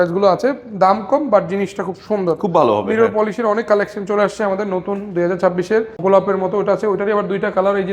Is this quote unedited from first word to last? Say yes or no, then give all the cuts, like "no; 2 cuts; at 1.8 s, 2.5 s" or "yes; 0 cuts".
no; 1 cut; at 6.0 s